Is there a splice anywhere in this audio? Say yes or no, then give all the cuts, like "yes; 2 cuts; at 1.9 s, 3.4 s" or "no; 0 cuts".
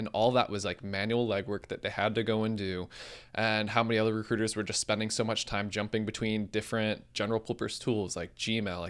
no; 0 cuts